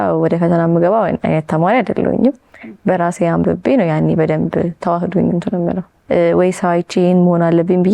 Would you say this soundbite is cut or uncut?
cut